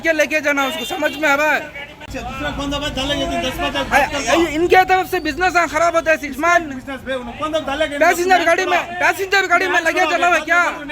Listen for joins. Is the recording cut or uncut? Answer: cut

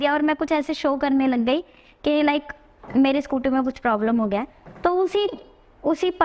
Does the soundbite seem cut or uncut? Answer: uncut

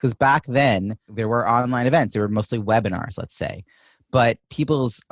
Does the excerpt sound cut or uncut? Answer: cut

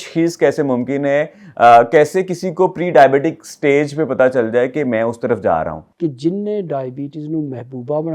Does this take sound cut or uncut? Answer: cut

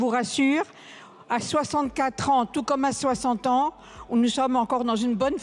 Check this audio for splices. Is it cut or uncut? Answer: uncut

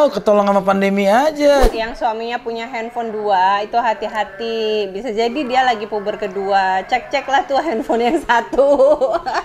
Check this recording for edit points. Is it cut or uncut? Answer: cut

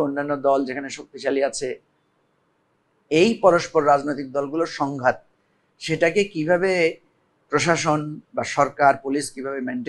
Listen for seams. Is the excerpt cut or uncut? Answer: uncut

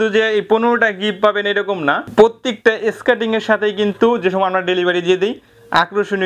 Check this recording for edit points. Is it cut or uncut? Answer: cut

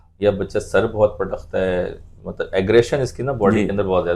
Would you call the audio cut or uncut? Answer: uncut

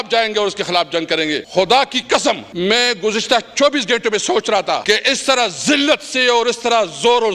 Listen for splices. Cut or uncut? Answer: cut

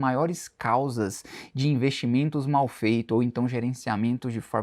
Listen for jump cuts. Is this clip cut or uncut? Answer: uncut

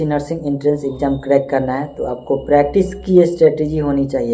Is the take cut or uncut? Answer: uncut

